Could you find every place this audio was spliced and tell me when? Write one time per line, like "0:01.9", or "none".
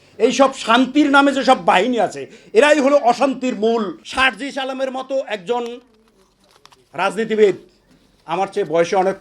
0:04.0